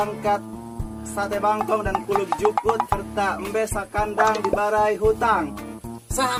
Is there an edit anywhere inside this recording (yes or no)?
no